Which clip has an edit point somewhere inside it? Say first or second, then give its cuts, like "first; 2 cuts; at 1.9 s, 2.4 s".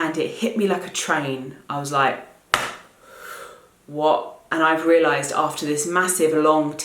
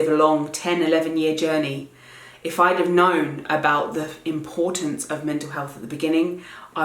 first; 1 cut; at 4.5 s